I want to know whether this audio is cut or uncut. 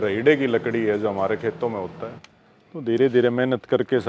cut